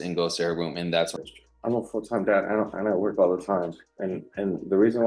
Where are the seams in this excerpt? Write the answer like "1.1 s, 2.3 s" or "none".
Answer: 1.1 s